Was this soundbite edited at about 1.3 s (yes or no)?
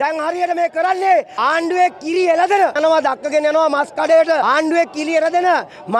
yes